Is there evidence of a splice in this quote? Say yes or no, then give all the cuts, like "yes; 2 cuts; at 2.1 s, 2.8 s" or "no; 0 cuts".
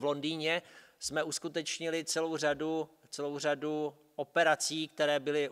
no; 0 cuts